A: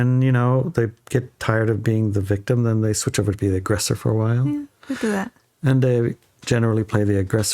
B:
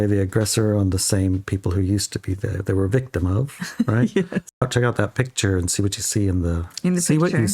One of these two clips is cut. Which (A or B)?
B